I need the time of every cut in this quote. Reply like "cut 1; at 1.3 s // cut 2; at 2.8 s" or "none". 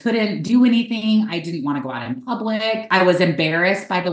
cut 1; at 2.9 s